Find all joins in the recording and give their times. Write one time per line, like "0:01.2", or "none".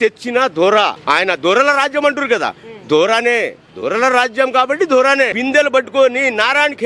0:01.0
0:05.4